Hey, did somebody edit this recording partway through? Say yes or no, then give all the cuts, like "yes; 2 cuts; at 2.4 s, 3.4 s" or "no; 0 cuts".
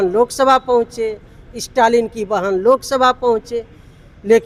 no; 0 cuts